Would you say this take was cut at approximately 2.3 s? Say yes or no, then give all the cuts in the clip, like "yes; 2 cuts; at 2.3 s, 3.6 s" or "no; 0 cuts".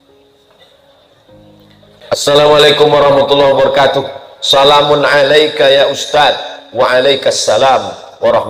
yes; 1 cut; at 2.3 s